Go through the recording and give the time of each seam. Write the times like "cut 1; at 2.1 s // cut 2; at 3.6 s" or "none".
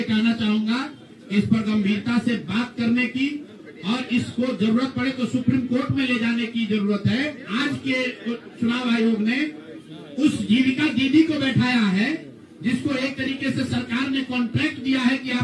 cut 1; at 7.4 s